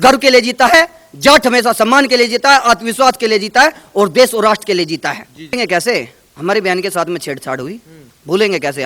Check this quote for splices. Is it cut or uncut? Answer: cut